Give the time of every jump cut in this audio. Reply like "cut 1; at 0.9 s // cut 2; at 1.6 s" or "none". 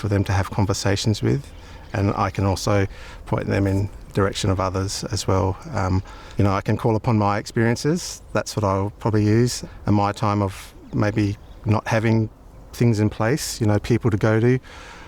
none